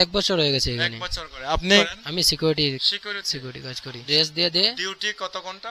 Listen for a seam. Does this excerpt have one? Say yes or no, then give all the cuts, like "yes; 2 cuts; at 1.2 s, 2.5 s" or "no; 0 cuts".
yes; 2 cuts; at 2.0 s, 4.0 s